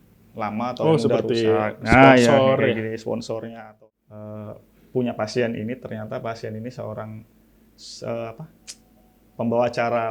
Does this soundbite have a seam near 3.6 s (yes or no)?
yes